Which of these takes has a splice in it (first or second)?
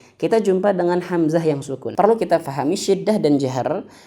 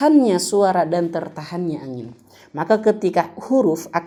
first